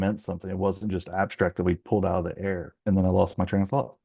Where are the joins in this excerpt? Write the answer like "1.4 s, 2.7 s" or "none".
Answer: none